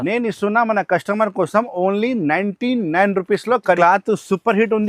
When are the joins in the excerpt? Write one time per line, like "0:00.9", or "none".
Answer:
0:03.8